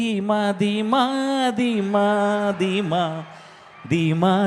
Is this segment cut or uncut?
uncut